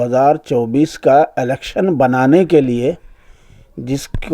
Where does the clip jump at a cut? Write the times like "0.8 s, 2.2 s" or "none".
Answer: none